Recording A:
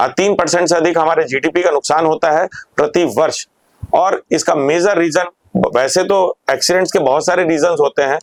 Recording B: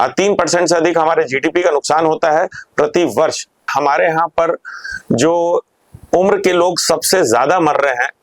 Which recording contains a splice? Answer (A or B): B